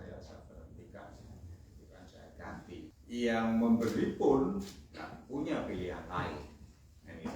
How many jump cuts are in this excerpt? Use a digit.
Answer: 1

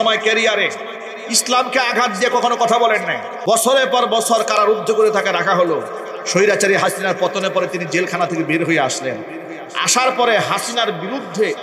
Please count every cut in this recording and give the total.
1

